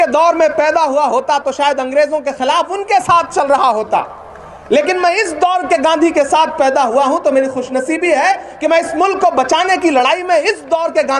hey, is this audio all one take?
yes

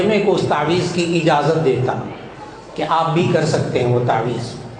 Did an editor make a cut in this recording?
no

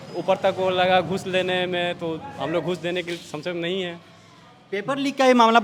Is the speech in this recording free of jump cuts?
yes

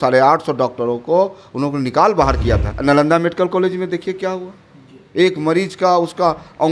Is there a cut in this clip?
yes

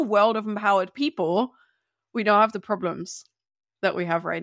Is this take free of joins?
yes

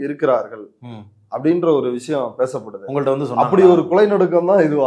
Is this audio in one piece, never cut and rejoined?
yes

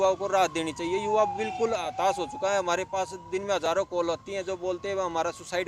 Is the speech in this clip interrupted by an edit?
no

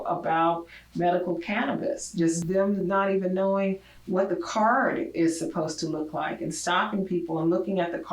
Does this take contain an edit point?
no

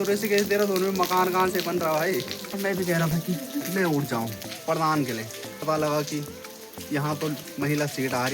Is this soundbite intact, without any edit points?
no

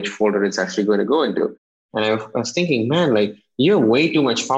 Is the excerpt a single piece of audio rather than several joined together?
yes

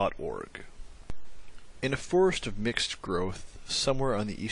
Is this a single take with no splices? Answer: yes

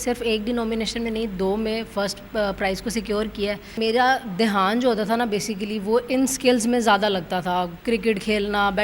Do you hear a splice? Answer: yes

